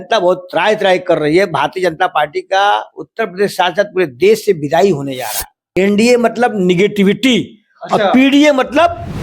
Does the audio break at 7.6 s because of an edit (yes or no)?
no